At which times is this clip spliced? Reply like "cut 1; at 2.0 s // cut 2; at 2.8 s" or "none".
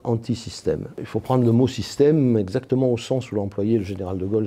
cut 1; at 1.0 s